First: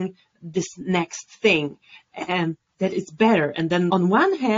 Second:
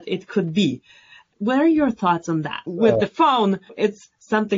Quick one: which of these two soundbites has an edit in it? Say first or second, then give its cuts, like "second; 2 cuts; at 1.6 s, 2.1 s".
second; 1 cut; at 2.7 s